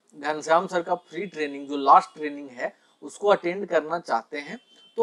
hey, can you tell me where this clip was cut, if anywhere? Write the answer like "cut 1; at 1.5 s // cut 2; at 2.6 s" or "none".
none